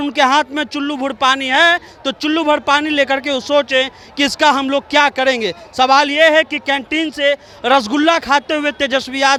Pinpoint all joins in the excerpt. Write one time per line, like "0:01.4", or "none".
none